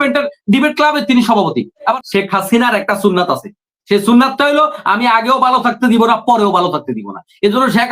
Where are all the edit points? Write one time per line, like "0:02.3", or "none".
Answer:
0:02.0